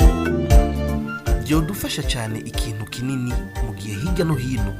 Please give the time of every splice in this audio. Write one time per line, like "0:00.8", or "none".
0:01.3